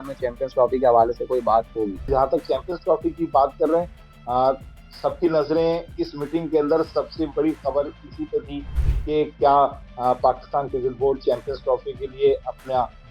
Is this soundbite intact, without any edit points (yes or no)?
no